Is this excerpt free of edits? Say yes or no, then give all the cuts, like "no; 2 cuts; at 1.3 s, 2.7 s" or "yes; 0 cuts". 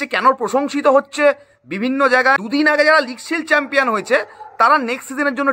no; 1 cut; at 2.4 s